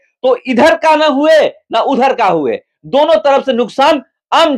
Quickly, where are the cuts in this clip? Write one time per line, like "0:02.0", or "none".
none

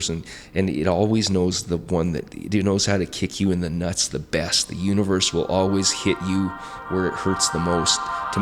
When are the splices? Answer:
none

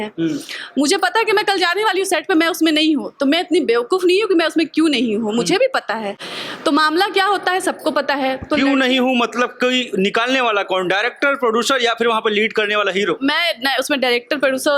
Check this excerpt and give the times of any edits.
none

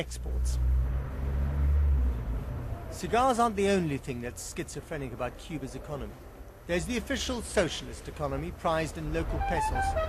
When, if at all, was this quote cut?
0:02.5

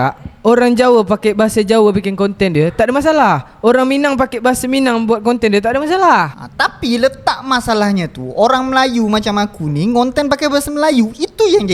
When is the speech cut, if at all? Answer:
none

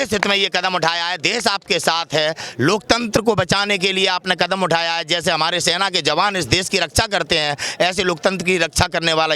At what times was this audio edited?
none

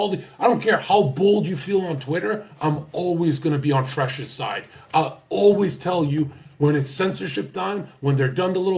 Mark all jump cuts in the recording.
none

